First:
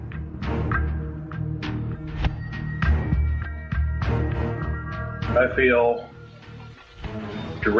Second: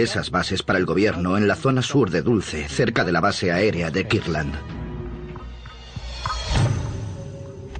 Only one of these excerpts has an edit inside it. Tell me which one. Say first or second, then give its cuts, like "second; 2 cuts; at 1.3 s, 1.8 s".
second; 1 cut; at 4.0 s